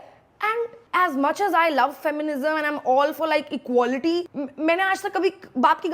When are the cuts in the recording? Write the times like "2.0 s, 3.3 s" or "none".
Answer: 4.3 s

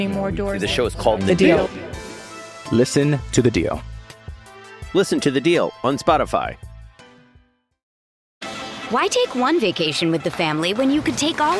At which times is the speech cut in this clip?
8.2 s

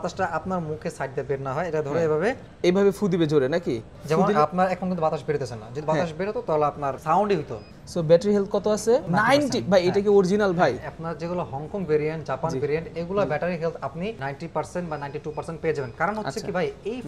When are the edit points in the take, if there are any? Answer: 2.5 s, 7.0 s, 7.7 s, 9.1 s, 14.2 s

